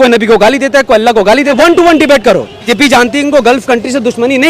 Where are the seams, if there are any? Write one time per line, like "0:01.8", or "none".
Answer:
0:01.6
0:02.7